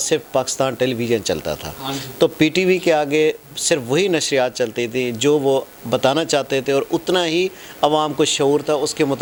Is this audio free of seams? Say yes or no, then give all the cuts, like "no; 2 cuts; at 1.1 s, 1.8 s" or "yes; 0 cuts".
yes; 0 cuts